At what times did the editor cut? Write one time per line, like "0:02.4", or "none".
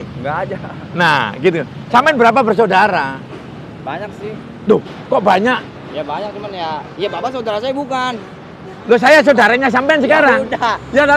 none

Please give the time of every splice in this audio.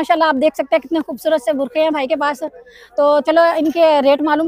none

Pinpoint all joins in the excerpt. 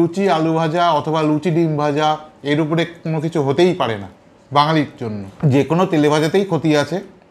0:05.3

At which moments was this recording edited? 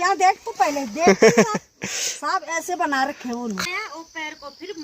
0:03.6

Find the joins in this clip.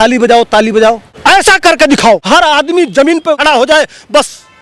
0:01.1
0:02.2
0:03.4

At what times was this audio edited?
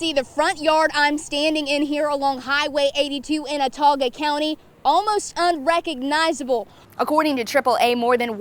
0:06.9

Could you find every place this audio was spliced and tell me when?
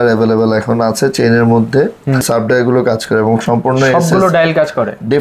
0:02.3

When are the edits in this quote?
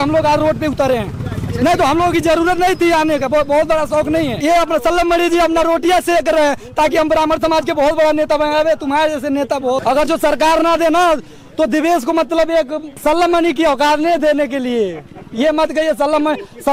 0:04.4
0:09.8
0:13.0

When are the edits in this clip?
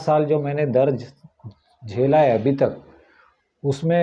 none

